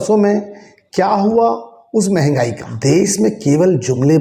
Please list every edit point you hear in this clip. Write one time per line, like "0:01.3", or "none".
0:02.7